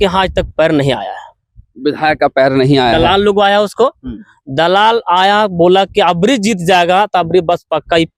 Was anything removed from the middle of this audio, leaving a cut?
no; 0 cuts

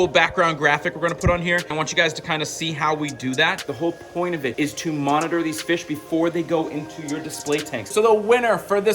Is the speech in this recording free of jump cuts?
no; 4 cuts; at 1.7 s, 3.6 s, 4.5 s, 7.9 s

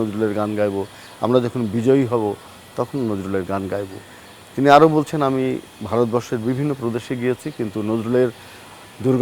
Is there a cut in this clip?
no; 0 cuts

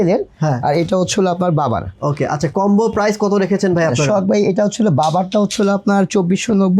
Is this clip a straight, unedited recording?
yes; 0 cuts

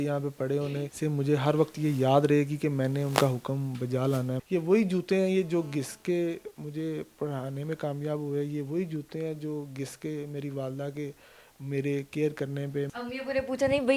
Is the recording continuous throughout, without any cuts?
no; 3 cuts; at 0.9 s, 4.4 s, 12.9 s

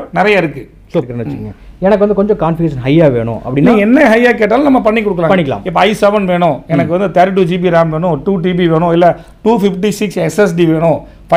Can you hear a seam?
yes; 1 cut; at 1.2 s

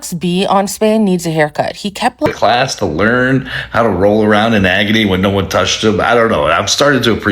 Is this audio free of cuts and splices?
no; 1 cut; at 2.3 s

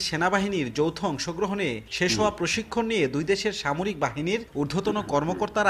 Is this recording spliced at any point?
no; 0 cuts

